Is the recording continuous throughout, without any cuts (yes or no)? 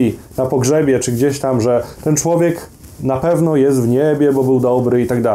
yes